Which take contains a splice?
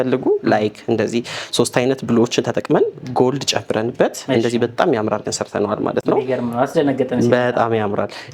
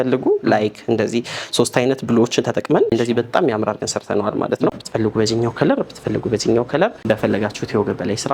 second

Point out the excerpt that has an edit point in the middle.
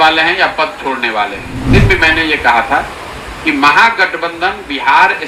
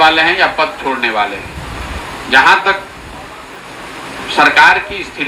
first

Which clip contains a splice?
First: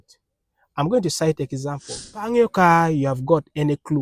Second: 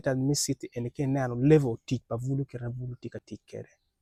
first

